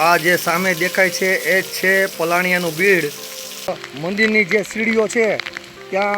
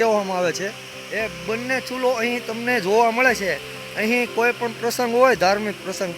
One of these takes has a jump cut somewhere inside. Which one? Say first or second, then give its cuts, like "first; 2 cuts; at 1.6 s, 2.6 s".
first; 1 cut; at 3.7 s